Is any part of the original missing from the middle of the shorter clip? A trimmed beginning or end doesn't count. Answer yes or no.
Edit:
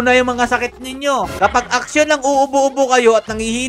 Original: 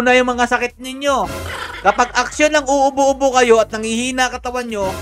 yes